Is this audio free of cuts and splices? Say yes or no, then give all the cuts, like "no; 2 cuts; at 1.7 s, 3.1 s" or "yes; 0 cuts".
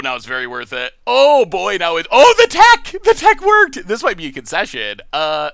yes; 0 cuts